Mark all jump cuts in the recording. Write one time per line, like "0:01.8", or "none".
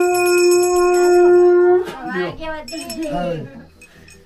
none